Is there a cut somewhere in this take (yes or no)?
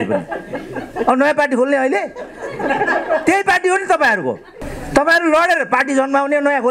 no